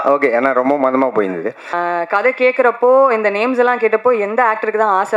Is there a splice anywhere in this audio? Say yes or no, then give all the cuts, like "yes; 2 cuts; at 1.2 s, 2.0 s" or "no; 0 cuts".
yes; 1 cut; at 1.8 s